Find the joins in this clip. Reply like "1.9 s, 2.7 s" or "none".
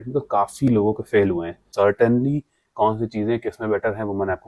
1.7 s